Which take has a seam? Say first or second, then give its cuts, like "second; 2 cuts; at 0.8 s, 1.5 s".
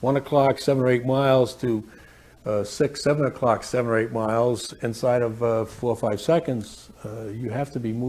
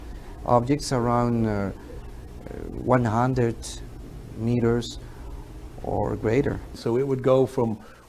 second; 1 cut; at 6.7 s